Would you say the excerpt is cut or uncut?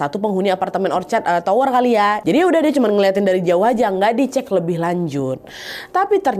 cut